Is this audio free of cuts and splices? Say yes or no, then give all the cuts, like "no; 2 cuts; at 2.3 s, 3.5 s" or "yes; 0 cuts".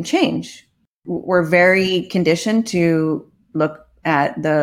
no; 1 cut; at 1.0 s